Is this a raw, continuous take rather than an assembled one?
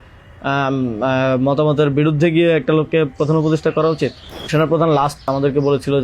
no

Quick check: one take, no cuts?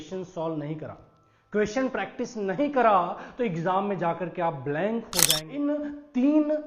no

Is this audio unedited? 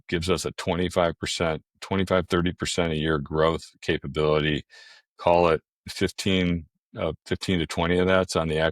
yes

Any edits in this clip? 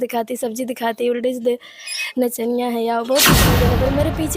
yes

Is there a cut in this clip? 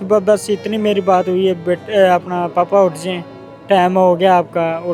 no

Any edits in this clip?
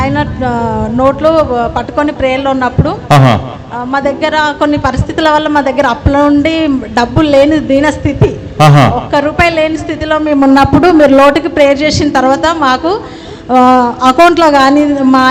no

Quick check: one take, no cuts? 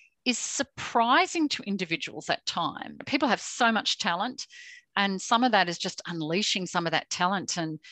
no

